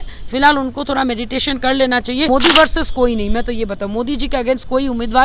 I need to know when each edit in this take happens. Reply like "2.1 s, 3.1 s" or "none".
2.3 s